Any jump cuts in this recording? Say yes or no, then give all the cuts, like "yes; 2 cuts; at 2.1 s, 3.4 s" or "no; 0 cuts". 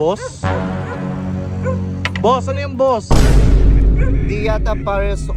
no; 0 cuts